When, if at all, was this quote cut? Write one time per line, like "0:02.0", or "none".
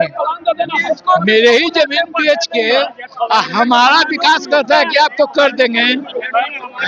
none